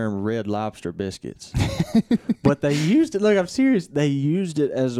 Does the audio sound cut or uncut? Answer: uncut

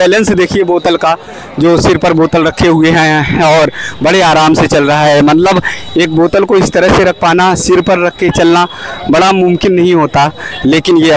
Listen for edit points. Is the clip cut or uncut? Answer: uncut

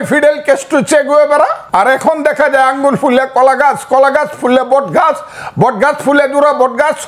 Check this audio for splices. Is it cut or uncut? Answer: cut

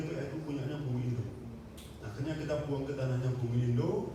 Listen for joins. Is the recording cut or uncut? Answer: uncut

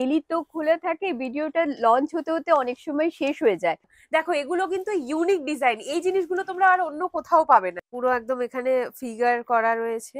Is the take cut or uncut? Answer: cut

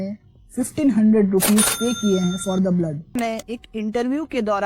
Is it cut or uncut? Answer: cut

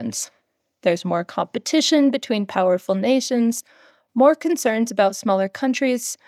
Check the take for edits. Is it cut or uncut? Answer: uncut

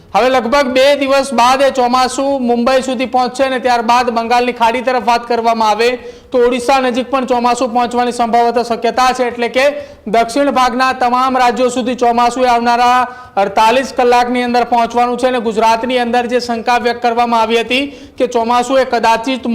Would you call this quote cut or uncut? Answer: uncut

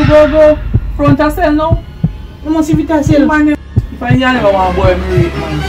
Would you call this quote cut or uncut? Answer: cut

